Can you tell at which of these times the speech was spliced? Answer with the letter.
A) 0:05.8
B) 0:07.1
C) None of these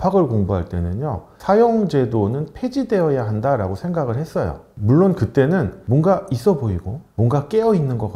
A